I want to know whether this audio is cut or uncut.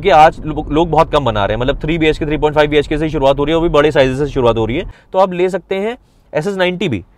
cut